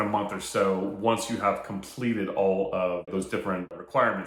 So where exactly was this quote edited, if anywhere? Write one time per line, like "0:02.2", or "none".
none